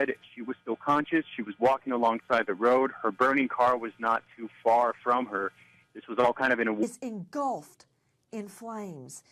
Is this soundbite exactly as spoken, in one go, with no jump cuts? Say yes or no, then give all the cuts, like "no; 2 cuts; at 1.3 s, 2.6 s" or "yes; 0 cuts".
yes; 0 cuts